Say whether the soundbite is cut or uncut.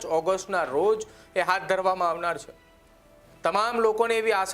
uncut